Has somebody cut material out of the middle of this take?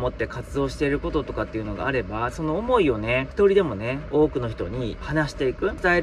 yes; 1 cut; at 3.3 s

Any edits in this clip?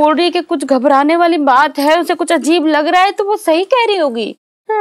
no; 0 cuts

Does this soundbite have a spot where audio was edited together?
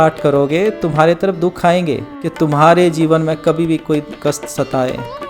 yes; 1 cut; at 2.1 s

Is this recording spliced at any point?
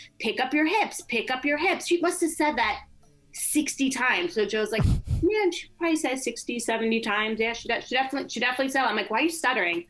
no; 0 cuts

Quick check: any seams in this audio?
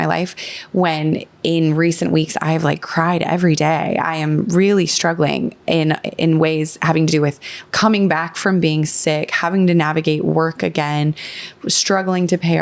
no; 0 cuts

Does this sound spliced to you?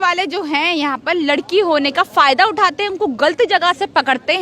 no; 0 cuts

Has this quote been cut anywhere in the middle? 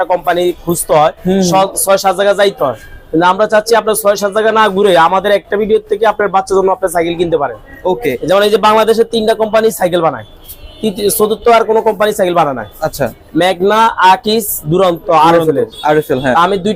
no; 0 cuts

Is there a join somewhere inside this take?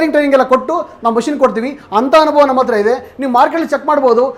no; 0 cuts

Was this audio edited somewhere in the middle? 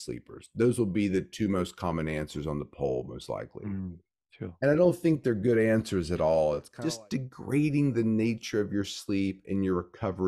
yes; 1 cut; at 6.7 s

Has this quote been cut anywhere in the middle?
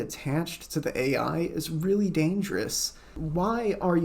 yes; 1 cut; at 3.2 s

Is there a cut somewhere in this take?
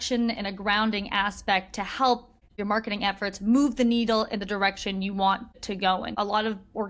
yes; 2 cuts; at 2.3 s, 5.7 s

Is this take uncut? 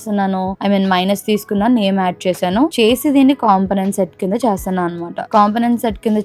yes; 0 cuts

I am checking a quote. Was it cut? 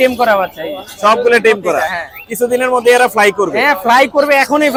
no; 0 cuts

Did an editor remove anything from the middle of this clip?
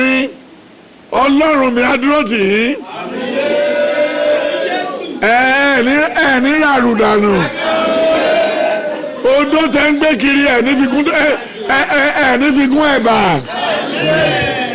no; 0 cuts

